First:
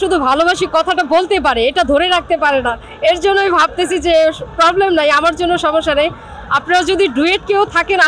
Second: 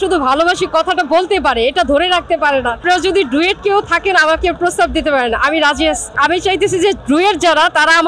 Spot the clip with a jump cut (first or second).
second